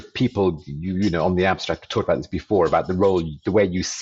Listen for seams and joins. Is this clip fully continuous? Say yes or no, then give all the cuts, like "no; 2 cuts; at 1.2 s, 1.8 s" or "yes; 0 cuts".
yes; 0 cuts